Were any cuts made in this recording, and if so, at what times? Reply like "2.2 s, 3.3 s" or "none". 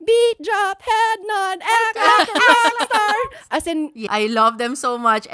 4.0 s